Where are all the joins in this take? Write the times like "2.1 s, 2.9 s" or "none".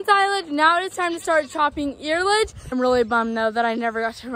2.7 s